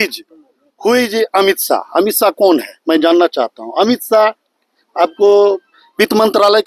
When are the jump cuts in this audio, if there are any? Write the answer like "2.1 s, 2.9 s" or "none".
none